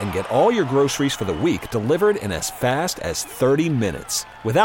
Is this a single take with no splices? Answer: yes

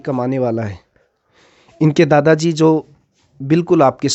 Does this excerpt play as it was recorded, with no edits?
yes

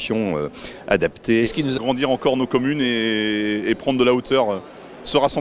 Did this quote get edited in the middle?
no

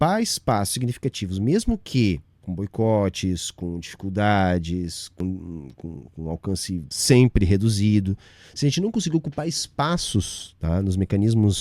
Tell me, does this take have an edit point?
yes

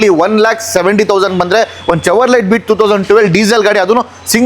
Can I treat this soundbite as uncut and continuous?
yes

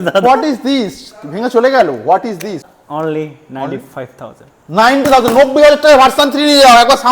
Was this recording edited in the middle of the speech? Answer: yes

